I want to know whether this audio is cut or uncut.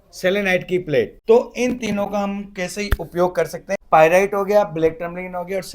cut